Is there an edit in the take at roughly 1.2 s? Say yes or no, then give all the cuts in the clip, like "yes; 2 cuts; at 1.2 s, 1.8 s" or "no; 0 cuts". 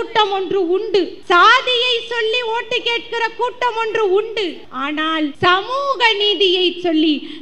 yes; 2 cuts; at 1.2 s, 5.1 s